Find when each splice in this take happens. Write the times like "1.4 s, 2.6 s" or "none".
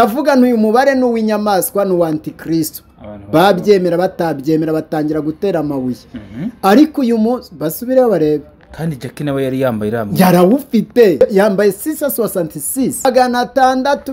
11.2 s, 13.1 s